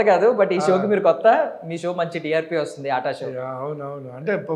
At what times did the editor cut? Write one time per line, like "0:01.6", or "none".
none